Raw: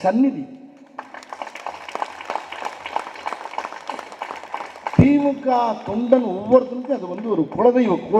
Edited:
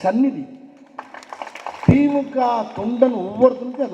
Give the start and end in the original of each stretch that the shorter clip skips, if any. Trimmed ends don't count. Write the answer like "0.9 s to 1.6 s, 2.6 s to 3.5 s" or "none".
1.8 s to 4.9 s